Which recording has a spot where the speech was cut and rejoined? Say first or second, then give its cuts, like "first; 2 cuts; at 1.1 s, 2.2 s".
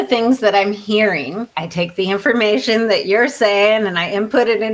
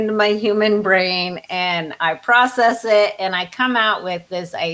first; 1 cut; at 1.6 s